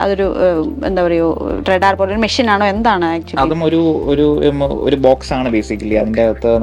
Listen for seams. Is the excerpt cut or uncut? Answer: uncut